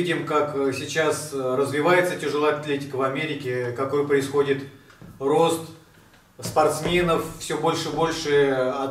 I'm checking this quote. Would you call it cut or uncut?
uncut